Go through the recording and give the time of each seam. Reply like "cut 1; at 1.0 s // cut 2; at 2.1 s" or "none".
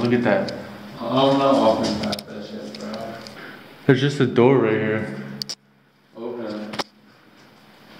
cut 1; at 3.4 s

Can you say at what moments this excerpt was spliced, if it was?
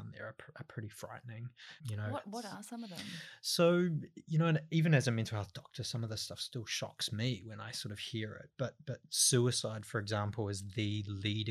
none

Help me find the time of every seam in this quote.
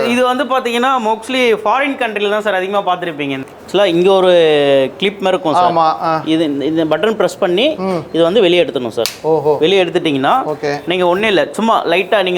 cut 1; at 3.4 s

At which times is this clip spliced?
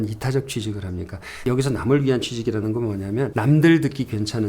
cut 1; at 3.3 s

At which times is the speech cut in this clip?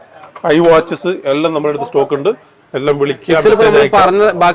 none

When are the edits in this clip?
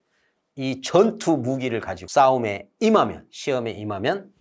cut 1; at 2.0 s

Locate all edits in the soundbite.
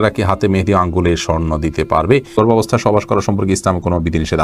cut 1; at 2.4 s

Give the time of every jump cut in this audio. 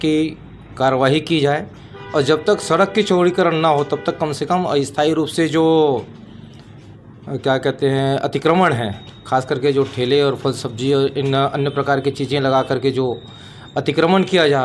none

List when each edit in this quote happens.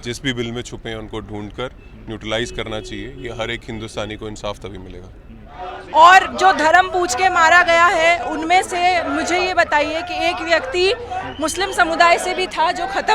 cut 1; at 5.8 s

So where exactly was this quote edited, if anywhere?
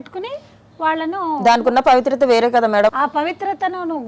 cut 1; at 2.9 s

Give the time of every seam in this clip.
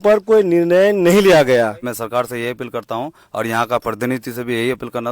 cut 1; at 1.9 s

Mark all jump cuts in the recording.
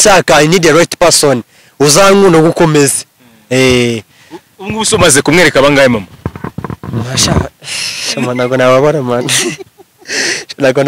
none

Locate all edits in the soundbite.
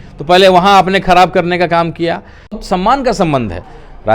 cut 1; at 2.6 s

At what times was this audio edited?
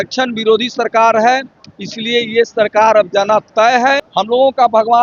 cut 1; at 4.1 s

